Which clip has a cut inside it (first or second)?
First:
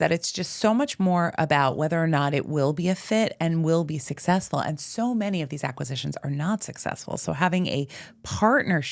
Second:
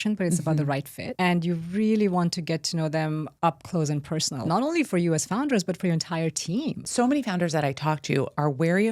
second